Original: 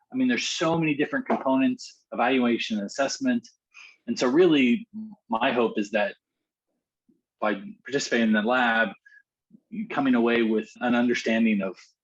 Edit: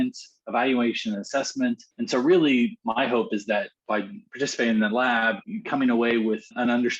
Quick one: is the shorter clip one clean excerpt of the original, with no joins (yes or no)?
no